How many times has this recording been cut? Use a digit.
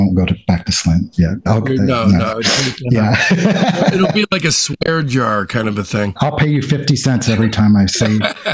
1